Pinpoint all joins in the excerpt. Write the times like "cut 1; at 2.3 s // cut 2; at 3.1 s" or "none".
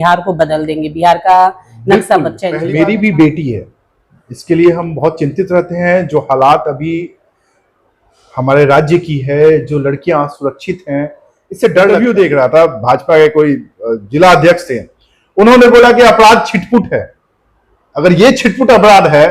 cut 1; at 2.4 s // cut 2; at 11.9 s